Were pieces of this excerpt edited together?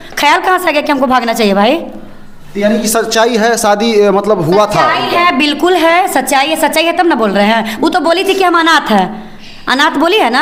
no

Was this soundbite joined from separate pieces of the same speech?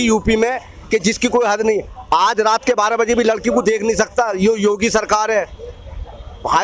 no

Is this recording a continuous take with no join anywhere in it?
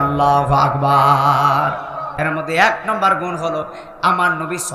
no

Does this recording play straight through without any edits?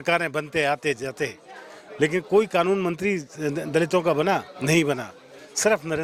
yes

